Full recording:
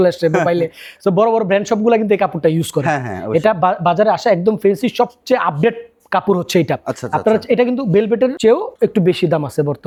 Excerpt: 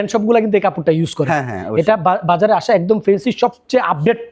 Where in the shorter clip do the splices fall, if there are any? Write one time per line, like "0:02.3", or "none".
none